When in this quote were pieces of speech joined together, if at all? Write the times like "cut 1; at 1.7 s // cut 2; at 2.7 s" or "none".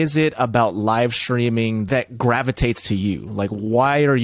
cut 1; at 1.9 s